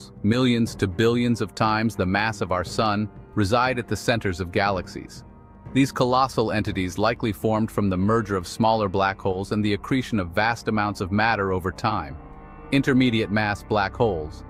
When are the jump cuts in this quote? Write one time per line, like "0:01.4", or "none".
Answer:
none

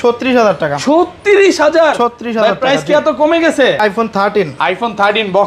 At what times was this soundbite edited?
0:03.8

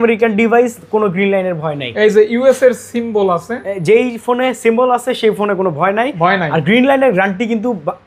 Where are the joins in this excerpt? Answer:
none

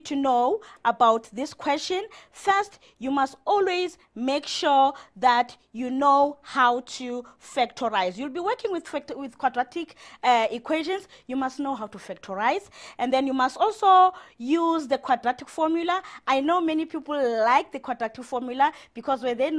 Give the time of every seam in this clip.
0:14.3

